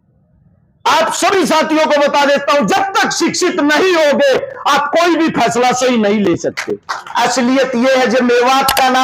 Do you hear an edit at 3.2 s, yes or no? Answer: no